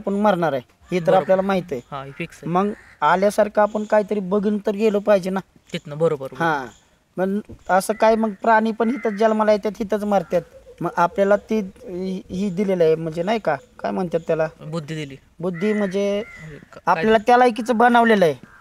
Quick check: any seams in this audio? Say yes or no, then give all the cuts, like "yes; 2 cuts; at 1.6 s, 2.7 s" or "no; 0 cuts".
no; 0 cuts